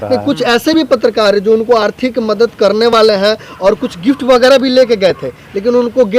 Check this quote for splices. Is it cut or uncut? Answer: uncut